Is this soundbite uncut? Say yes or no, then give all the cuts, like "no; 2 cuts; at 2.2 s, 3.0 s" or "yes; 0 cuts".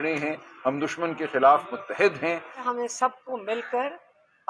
no; 1 cut; at 2.6 s